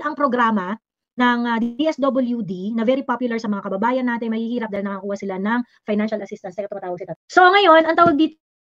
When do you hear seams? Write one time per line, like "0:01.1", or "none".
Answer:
0:07.1